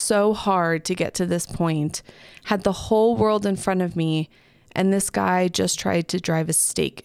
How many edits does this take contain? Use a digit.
0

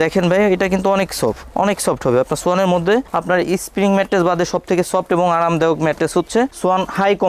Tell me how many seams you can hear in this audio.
0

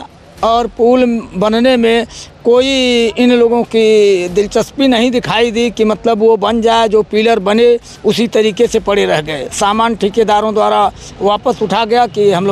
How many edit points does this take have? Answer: 0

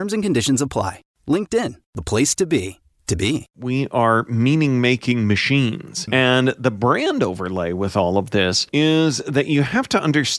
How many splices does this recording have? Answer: 3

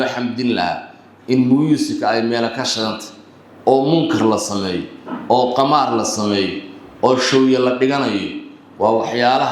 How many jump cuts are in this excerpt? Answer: 0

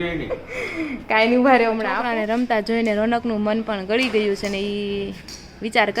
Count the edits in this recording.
1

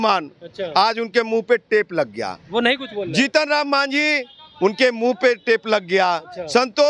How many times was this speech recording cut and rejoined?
0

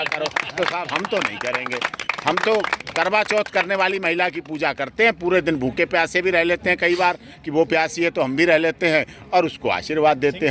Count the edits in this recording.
0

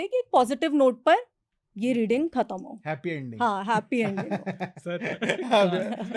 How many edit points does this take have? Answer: 0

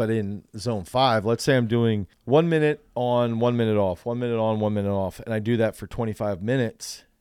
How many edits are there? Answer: 1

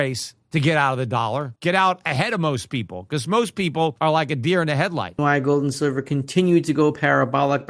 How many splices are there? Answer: 3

